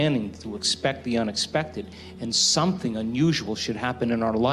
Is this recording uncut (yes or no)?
yes